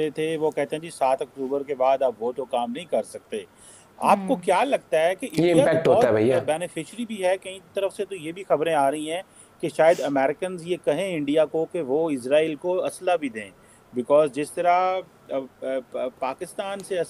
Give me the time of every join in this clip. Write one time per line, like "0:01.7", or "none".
none